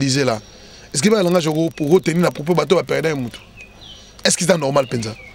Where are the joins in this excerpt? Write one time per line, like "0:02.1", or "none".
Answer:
none